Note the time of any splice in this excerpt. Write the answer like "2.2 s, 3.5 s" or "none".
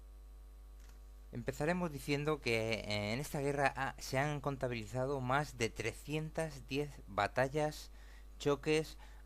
7.5 s